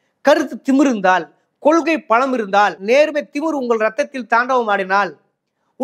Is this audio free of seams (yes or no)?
yes